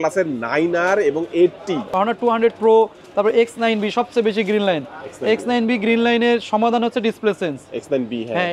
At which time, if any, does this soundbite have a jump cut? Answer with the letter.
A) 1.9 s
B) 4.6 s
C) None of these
A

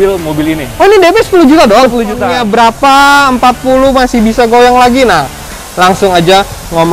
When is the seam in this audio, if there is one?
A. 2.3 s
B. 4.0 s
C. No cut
A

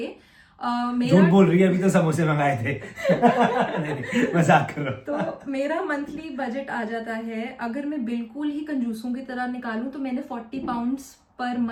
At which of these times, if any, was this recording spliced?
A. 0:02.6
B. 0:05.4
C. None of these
C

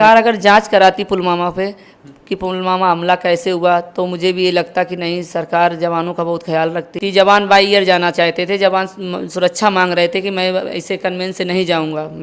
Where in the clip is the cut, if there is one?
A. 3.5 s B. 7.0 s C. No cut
B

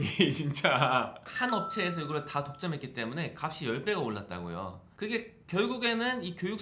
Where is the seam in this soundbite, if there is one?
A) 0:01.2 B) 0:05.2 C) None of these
A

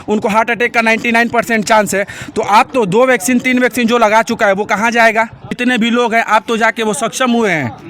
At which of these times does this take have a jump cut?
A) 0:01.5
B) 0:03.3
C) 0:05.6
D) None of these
C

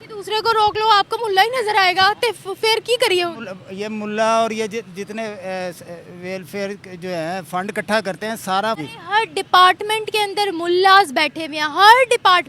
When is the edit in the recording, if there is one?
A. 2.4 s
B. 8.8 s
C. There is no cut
B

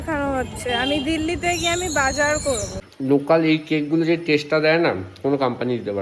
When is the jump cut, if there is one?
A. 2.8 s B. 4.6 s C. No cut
A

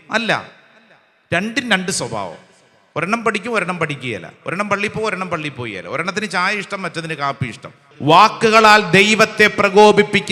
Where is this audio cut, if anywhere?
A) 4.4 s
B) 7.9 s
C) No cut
B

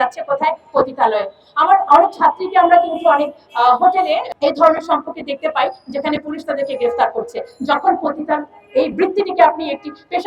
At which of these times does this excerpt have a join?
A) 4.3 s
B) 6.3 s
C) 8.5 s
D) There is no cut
A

